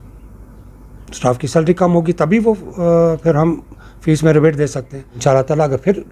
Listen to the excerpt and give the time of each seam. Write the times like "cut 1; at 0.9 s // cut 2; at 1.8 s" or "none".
cut 1; at 5.2 s